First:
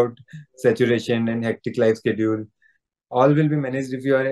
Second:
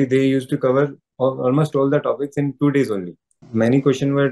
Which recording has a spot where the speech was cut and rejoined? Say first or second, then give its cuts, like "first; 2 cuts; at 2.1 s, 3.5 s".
second; 1 cut; at 1.0 s